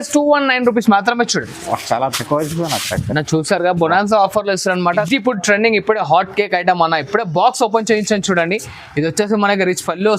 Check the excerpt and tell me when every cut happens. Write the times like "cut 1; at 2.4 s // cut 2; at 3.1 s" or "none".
cut 1; at 5.1 s